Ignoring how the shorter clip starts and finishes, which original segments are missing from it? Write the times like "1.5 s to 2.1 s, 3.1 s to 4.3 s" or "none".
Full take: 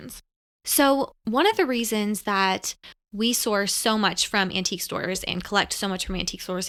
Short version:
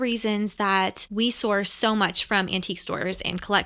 2.7 s to 3.0 s